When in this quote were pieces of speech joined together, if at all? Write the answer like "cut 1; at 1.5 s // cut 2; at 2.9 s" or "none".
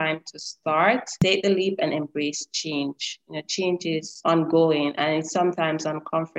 cut 1; at 1.2 s // cut 2; at 4.1 s